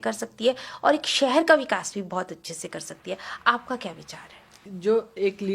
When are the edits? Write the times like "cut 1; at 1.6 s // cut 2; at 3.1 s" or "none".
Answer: cut 1; at 4.6 s